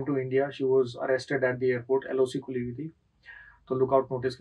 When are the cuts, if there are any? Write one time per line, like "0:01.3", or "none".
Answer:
none